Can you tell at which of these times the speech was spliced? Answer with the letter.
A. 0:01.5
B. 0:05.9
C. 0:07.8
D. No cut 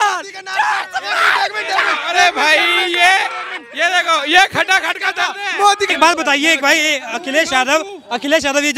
B